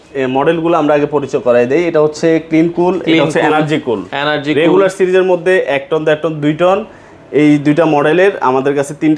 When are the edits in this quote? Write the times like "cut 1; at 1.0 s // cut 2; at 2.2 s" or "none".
none